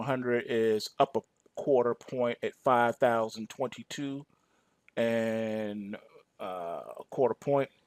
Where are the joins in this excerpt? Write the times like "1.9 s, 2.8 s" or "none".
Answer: none